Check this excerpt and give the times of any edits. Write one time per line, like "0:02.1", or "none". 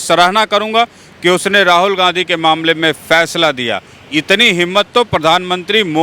none